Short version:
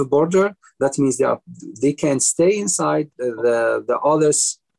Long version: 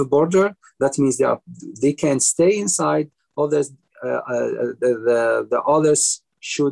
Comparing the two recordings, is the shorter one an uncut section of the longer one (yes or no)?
no